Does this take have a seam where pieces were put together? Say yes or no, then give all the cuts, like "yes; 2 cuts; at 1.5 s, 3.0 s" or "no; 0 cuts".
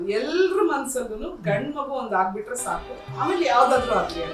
yes; 1 cut; at 3.0 s